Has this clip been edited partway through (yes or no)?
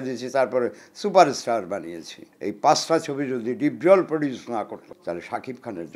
yes